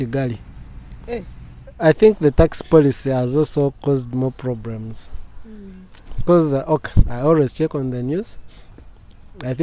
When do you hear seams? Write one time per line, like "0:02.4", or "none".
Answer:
0:01.6